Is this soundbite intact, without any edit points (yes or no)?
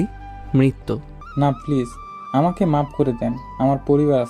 no